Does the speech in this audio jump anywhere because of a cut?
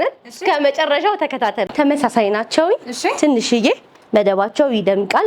yes; 1 cut; at 1.7 s

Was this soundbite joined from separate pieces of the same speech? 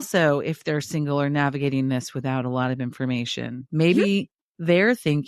no; 0 cuts

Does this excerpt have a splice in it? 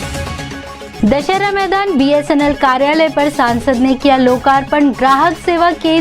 yes; 1 cut; at 0.9 s

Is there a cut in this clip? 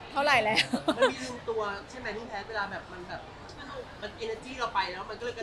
no; 0 cuts

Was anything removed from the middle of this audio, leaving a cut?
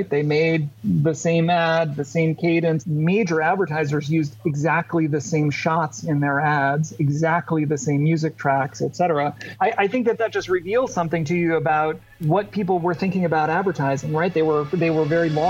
yes; 3 cuts; at 2.8 s, 9.5 s, 12.1 s

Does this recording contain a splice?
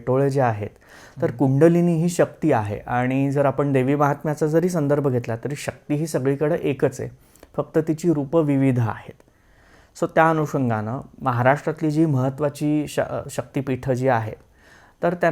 no; 0 cuts

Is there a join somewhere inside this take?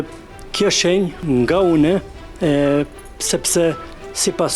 yes; 1 cut; at 1.2 s

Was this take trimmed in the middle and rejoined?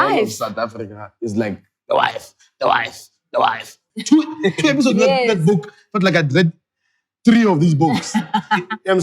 yes; 1 cut; at 3.8 s

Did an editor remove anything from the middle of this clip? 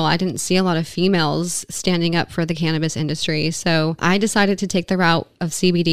yes; 1 cut; at 4.0 s

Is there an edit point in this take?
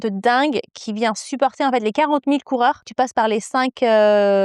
yes; 1 cut; at 2.9 s

